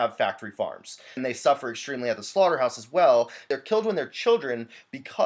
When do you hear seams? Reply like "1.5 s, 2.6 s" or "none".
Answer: 1.2 s, 3.5 s